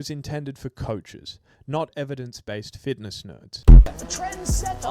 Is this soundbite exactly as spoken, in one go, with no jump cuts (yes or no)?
no